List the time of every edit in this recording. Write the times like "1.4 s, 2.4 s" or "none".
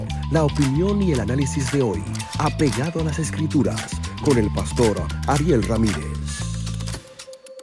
none